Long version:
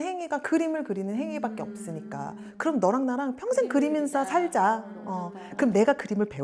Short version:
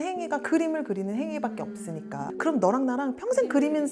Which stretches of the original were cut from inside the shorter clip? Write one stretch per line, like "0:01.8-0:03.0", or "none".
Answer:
0:02.3-0:02.5